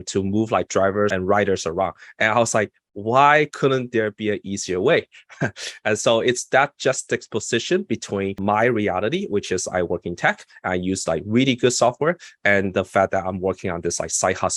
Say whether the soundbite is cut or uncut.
cut